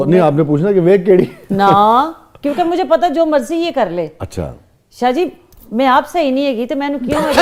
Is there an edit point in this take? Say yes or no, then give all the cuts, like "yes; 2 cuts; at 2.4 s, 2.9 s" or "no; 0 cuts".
no; 0 cuts